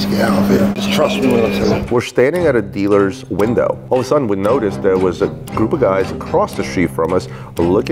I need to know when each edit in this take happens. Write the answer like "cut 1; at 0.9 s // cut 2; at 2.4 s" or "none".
cut 1; at 0.8 s // cut 2; at 1.8 s